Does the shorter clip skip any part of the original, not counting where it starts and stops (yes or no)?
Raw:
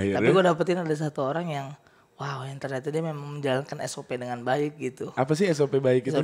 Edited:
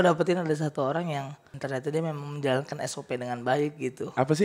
yes